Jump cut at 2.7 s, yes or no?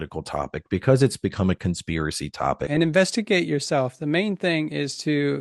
yes